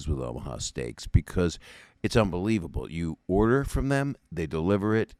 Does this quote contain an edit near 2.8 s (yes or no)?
no